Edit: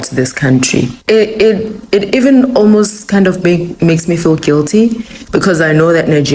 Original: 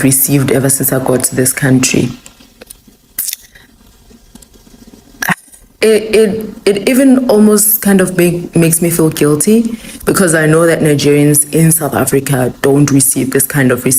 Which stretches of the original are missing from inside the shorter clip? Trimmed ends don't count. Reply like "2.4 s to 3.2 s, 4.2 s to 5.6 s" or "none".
2.2 s to 5.7 s